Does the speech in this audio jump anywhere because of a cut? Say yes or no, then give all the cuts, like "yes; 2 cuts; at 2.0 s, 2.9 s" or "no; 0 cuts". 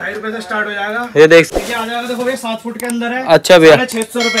yes; 1 cut; at 1.5 s